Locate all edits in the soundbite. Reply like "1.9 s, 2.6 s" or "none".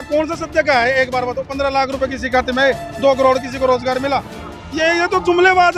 none